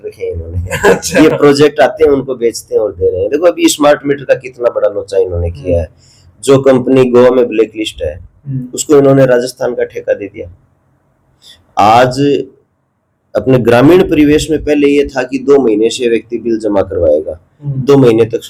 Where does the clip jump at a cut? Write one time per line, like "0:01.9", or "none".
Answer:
none